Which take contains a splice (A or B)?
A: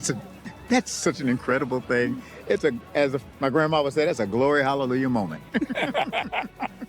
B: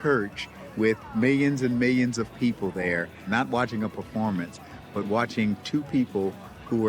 B